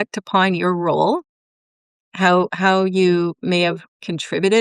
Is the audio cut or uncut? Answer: uncut